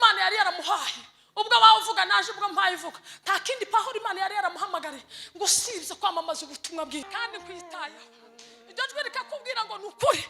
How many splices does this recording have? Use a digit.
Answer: 1